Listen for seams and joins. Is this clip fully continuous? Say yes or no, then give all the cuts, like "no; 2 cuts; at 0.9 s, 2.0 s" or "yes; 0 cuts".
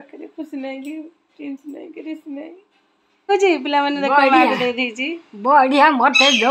no; 1 cut; at 3.3 s